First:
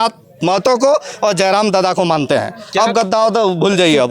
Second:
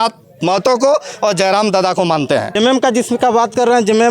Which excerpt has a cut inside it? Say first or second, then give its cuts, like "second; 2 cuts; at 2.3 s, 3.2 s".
second; 1 cut; at 2.5 s